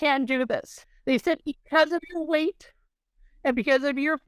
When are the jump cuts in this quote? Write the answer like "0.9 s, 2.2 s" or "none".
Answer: 1.0 s